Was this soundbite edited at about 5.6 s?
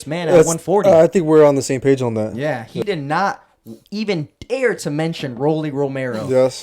no; 1 cut; at 2.8 s

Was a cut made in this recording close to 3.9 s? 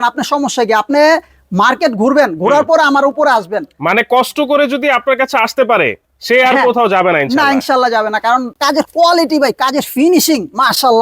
no; 1 cut; at 8.6 s

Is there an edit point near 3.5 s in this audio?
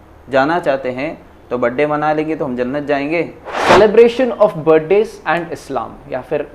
yes; 1 cut; at 3.5 s

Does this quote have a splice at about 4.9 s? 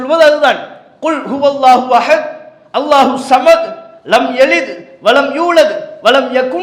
no; 0 cuts

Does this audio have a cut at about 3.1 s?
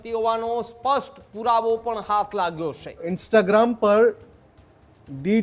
yes; 1 cut; at 3.1 s

